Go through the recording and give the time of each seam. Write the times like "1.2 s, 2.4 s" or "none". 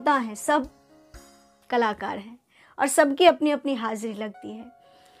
none